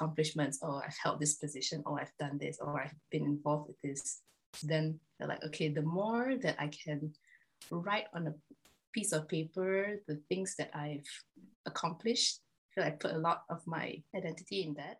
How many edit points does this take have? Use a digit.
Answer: 1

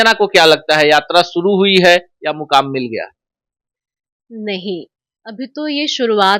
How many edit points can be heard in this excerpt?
0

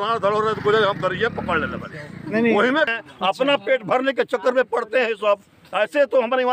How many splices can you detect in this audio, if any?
1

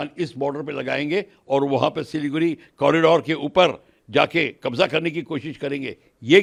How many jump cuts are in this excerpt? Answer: 0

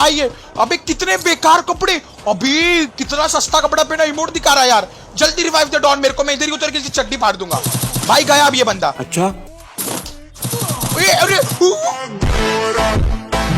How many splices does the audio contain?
1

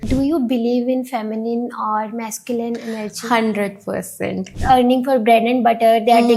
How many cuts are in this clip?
1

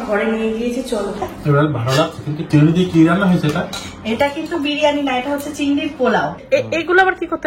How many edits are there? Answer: 3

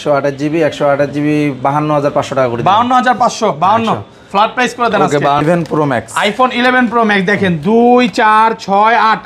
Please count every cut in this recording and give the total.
1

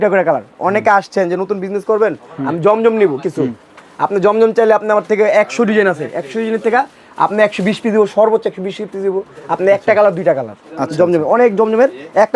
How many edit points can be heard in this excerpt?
0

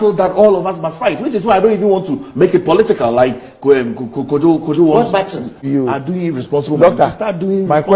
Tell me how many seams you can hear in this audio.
1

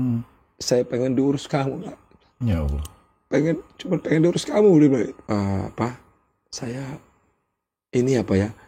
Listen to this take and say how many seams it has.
1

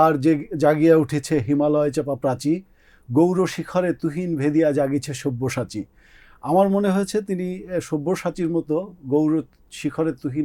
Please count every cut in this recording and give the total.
0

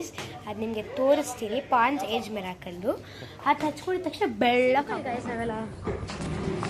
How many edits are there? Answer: 1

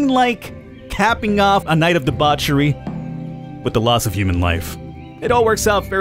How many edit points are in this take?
1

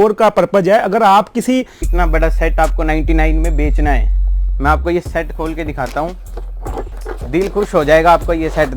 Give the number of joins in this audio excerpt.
2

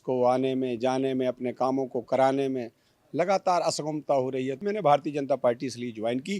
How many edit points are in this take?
1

